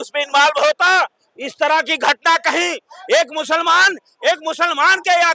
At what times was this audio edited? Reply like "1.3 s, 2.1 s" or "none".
none